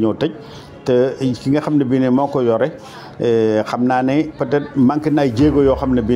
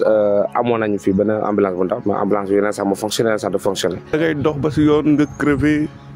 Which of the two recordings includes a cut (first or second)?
second